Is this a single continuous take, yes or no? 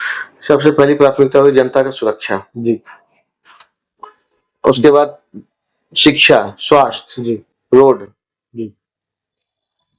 yes